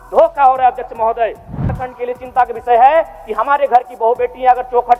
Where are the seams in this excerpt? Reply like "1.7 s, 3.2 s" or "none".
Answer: 1.9 s